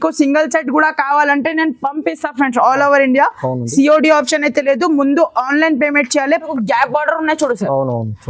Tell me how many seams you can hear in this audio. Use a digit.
1